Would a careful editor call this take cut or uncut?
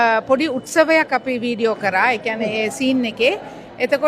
uncut